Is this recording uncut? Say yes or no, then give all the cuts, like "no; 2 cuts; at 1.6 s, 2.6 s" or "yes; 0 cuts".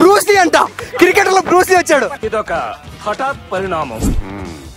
yes; 0 cuts